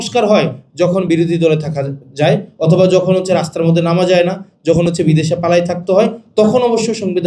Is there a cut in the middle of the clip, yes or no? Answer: no